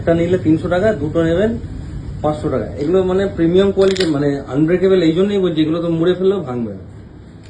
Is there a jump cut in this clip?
no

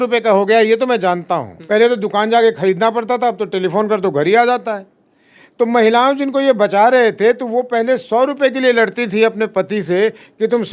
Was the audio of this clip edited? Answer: no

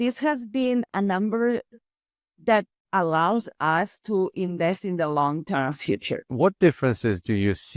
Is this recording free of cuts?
no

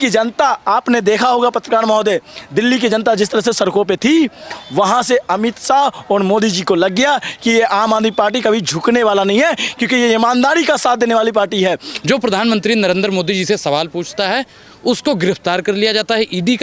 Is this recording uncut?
no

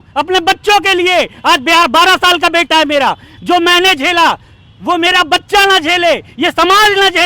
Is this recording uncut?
yes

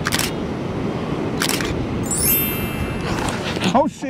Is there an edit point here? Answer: yes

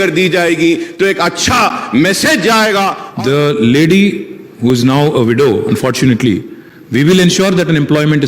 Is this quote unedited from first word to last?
no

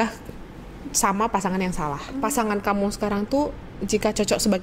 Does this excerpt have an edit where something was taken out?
yes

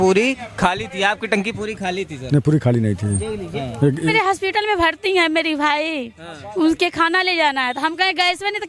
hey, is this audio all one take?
no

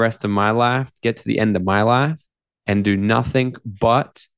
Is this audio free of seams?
yes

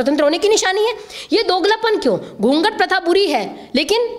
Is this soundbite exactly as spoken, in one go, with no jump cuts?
yes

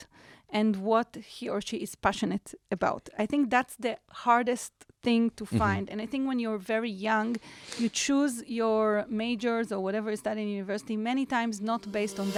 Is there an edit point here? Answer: no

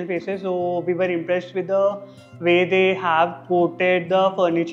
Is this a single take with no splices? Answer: yes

